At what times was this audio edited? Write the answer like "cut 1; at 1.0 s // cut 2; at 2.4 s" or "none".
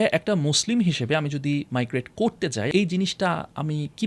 cut 1; at 2.7 s